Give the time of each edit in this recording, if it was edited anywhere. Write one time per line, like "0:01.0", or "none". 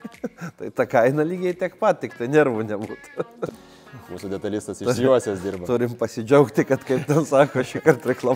0:03.5